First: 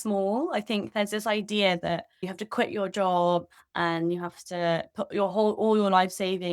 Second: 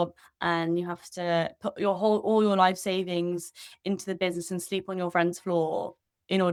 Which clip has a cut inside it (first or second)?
first